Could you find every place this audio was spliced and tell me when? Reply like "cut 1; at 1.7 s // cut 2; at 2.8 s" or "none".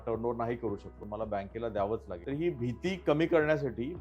cut 1; at 1.0 s // cut 2; at 2.1 s